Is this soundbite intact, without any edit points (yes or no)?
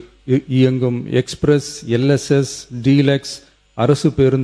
yes